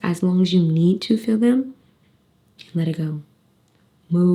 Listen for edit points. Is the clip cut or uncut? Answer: uncut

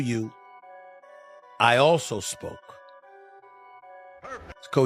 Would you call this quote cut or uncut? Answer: uncut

